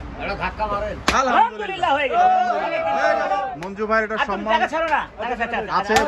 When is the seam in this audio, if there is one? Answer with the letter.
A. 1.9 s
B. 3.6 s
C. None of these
B